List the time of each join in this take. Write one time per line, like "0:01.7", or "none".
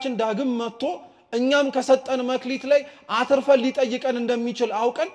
none